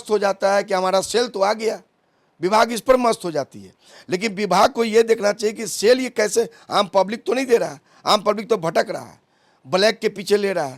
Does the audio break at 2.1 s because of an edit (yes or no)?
no